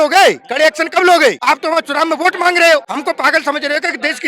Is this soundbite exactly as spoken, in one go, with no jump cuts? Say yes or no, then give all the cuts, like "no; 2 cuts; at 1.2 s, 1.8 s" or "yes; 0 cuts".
no; 2 cuts; at 1.4 s, 2.9 s